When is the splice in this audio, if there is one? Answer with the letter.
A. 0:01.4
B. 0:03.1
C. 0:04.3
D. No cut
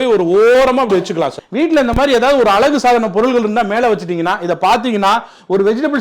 A